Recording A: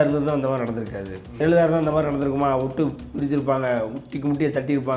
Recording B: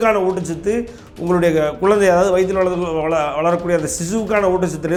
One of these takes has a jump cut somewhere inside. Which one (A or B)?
A